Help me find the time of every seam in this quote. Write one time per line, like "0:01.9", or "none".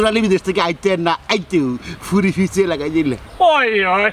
0:03.2